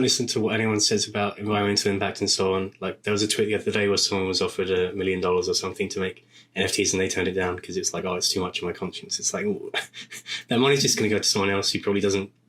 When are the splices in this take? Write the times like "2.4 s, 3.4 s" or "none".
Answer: 1.4 s